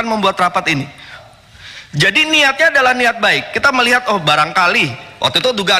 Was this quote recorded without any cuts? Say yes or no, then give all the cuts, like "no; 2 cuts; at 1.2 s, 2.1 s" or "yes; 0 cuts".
no; 1 cut; at 1.2 s